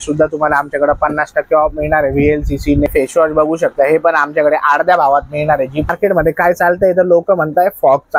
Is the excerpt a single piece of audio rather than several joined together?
no; 2 cuts; at 2.9 s, 5.9 s

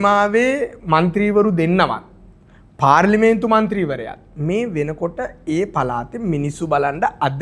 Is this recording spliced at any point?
no; 0 cuts

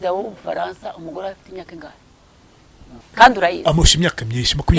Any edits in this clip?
yes; 1 cut; at 3.0 s

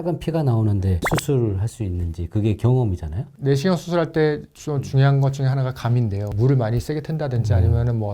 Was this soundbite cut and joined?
yes; 2 cuts; at 1.0 s, 6.3 s

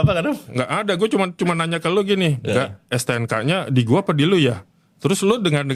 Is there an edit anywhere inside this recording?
no; 0 cuts

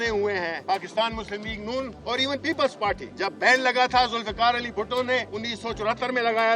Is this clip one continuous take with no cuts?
no; 4 cuts; at 0.9 s, 1.9 s, 3.1 s, 5.4 s

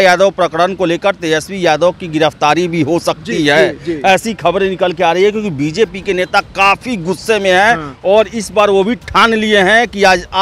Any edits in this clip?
no; 0 cuts

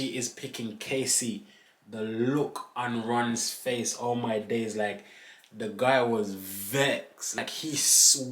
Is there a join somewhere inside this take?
yes; 1 cut; at 7.4 s

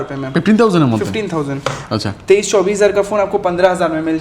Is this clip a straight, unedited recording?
yes; 0 cuts

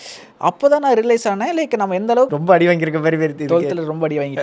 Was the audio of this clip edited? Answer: yes; 1 cut; at 2.3 s

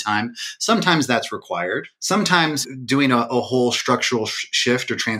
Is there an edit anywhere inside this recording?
yes; 2 cuts; at 1.9 s, 2.6 s

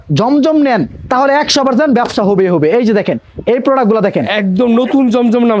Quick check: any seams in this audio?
no; 0 cuts

